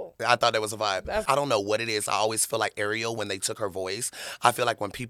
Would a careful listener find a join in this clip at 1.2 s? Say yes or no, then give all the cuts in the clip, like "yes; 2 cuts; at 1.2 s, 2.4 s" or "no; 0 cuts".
yes; 1 cut; at 1.2 s